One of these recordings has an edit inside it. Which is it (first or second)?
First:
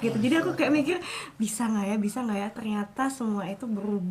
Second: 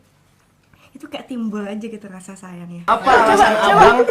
second